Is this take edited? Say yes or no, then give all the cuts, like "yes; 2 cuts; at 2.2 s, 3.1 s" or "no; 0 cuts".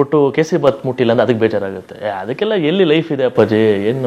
no; 0 cuts